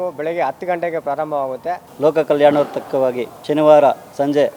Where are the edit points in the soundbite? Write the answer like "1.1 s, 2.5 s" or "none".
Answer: 1.9 s, 3.3 s